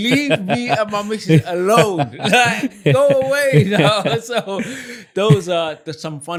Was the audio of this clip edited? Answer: no; 0 cuts

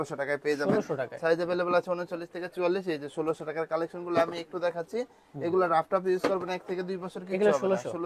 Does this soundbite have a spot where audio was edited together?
no; 0 cuts

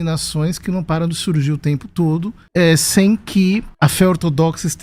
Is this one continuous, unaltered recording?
no; 2 cuts; at 2.4 s, 3.7 s

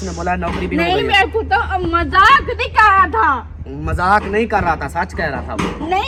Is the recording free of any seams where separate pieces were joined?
yes; 0 cuts

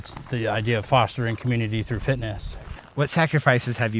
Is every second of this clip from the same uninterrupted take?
no; 1 cut; at 2.8 s

